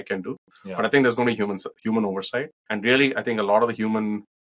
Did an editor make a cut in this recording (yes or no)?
yes